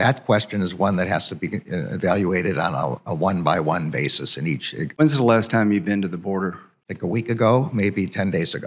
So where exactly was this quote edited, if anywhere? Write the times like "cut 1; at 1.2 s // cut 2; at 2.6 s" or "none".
cut 1; at 5.0 s